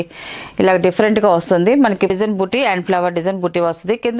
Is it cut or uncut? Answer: cut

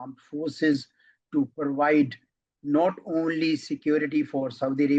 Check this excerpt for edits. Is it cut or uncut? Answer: uncut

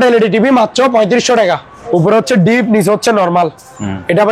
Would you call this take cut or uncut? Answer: cut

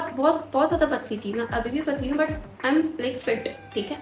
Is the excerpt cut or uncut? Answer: uncut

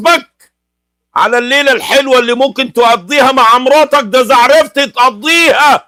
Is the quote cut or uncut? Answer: uncut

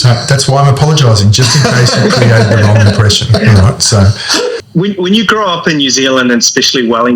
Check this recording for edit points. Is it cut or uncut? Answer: cut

